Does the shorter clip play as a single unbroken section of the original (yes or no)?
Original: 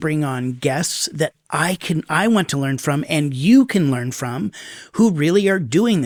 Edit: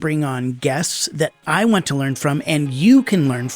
no